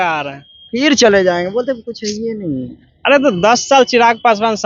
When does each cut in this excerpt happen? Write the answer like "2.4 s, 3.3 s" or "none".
none